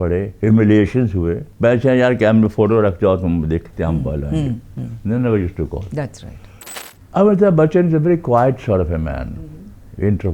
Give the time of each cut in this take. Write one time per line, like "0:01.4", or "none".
0:01.4
0:06.7